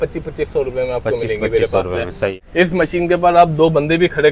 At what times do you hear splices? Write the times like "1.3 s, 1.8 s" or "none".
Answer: 2.4 s